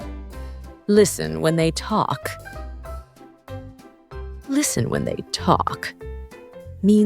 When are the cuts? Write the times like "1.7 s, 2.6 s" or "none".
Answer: 0.8 s, 2.4 s, 4.2 s